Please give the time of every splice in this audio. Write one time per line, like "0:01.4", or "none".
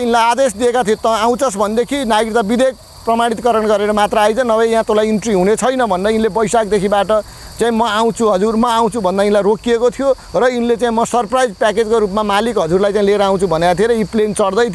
none